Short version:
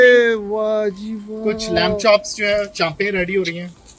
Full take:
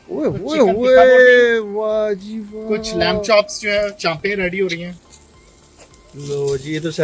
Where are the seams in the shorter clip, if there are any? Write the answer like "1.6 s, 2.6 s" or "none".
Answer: none